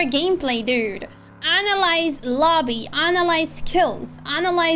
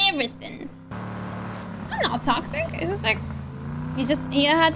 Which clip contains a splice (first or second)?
second